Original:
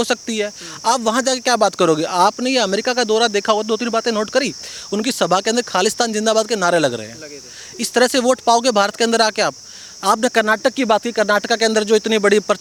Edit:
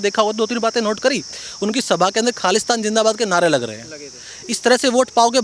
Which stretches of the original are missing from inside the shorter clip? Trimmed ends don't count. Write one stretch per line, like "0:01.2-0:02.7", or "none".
none